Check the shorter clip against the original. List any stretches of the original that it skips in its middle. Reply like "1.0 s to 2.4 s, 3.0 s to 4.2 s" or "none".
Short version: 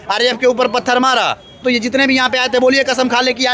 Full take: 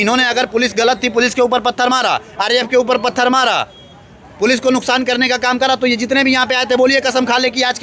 3.9 s to 5.8 s